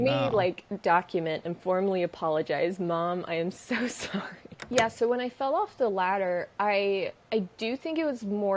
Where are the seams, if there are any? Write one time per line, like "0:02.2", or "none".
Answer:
0:04.5